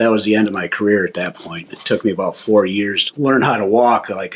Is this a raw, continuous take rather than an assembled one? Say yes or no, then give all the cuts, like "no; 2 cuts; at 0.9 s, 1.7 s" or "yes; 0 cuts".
no; 1 cut; at 3.1 s